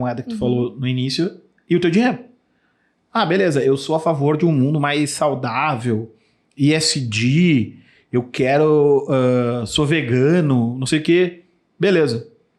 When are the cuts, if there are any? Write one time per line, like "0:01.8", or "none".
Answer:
none